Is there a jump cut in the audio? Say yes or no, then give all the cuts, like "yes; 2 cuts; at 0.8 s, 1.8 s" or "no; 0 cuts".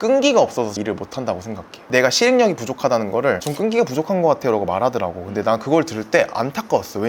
yes; 1 cut; at 1.9 s